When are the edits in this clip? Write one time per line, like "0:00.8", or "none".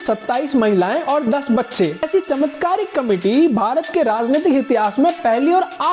0:02.1